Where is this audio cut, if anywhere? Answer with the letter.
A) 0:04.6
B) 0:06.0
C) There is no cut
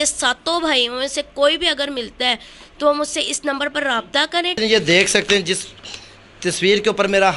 A